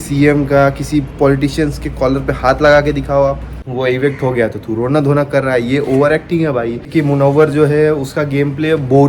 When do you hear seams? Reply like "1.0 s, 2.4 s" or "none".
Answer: 3.5 s, 6.9 s